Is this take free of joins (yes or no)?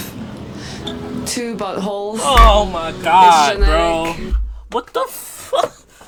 yes